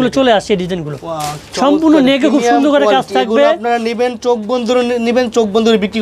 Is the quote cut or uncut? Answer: uncut